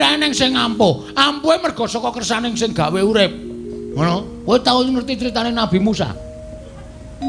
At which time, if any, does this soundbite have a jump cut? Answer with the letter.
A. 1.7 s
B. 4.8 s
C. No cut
C